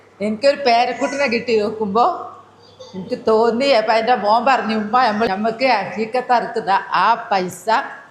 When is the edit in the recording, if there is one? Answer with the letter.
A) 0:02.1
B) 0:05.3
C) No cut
B